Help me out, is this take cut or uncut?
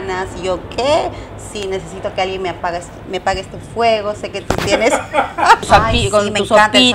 cut